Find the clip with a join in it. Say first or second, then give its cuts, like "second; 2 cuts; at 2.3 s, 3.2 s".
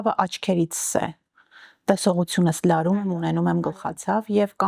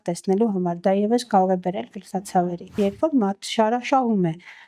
second; 1 cut; at 2.8 s